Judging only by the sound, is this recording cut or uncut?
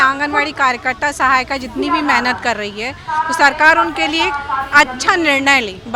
uncut